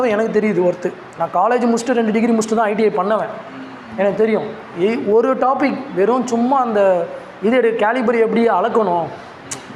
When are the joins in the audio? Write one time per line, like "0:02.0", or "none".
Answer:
0:01.2